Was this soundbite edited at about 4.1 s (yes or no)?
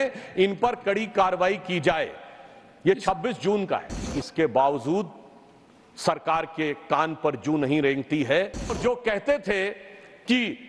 yes